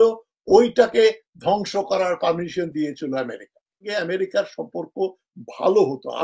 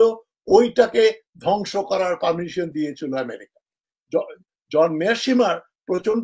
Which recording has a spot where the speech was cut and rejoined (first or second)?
first